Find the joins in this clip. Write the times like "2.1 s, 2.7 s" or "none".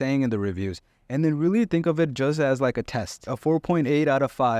3.3 s